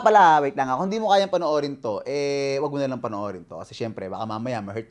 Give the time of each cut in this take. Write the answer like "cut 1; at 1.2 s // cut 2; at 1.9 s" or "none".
none